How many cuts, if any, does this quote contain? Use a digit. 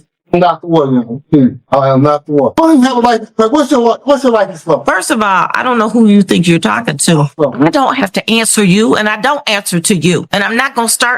2